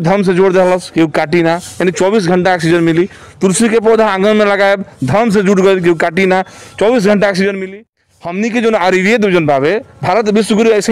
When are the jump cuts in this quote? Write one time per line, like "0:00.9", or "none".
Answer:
0:07.6